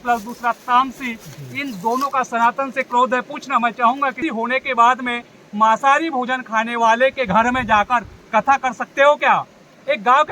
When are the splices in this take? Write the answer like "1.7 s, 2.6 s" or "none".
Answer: 4.2 s